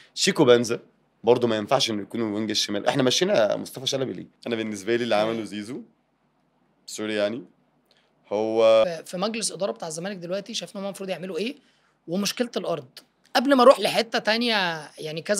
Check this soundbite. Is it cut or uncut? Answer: cut